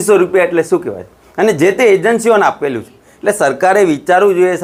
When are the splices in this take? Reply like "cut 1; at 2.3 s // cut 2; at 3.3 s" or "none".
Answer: none

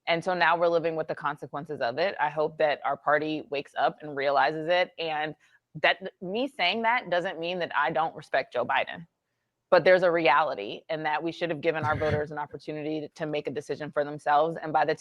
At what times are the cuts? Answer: none

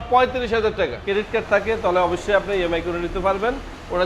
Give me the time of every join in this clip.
cut 1; at 1.0 s

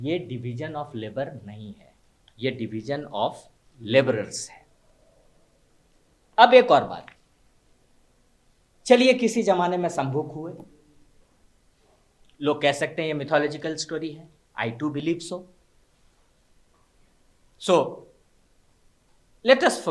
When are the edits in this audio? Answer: none

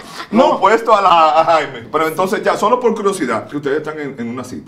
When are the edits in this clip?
cut 1; at 1.1 s // cut 2; at 3.5 s

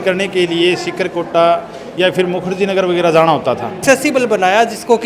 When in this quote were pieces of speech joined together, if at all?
cut 1; at 3.8 s

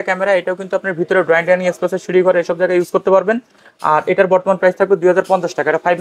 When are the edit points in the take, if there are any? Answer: none

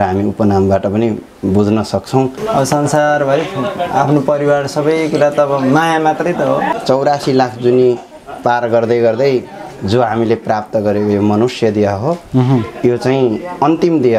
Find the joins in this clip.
cut 1; at 2.4 s // cut 2; at 6.7 s

